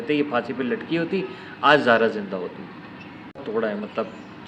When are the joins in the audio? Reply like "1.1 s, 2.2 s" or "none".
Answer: 3.4 s